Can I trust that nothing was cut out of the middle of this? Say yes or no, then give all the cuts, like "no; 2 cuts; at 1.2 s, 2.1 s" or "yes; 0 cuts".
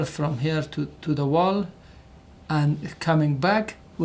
yes; 0 cuts